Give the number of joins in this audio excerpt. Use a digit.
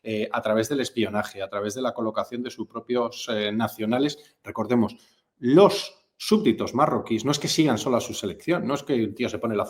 0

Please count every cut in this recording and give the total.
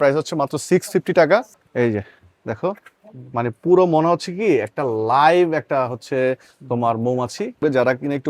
2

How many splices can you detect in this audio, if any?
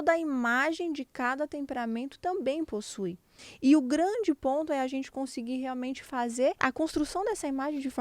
2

